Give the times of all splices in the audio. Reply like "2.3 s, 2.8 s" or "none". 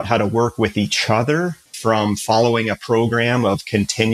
1.6 s